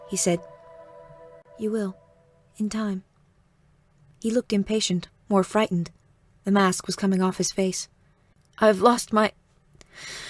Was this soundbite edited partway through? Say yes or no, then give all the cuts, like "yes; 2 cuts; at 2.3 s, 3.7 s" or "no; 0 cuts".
no; 0 cuts